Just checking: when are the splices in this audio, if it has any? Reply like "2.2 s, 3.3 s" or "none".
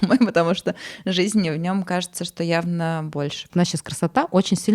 3.5 s